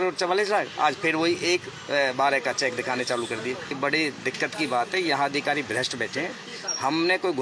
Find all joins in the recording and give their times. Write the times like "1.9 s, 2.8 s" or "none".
3.7 s